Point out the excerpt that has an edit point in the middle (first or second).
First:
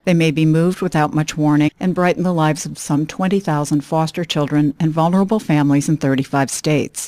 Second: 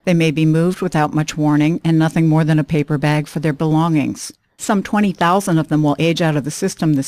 second